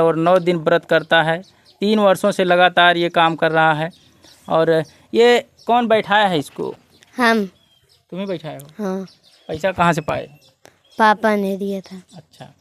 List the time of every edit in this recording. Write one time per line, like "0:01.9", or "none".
none